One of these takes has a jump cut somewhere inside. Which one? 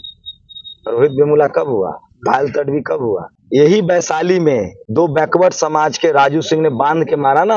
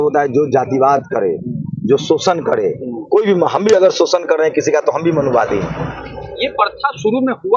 first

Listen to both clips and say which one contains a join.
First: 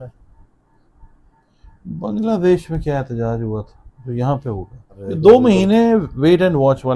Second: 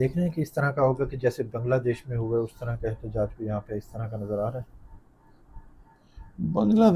first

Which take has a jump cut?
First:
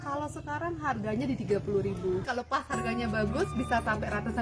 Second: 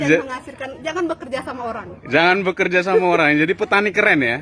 first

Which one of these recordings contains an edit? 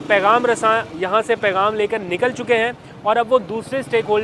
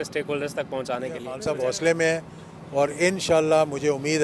second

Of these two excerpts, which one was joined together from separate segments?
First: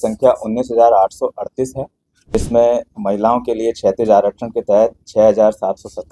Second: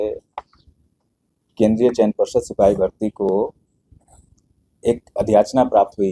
first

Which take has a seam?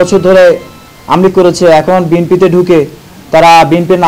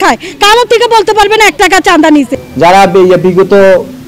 second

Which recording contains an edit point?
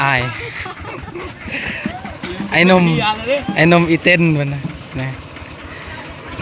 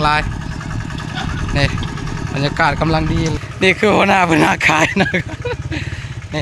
second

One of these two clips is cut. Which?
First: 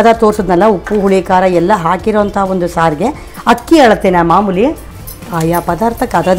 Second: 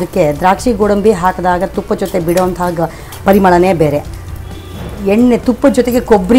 first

